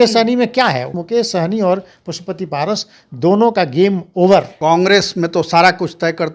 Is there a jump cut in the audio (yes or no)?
yes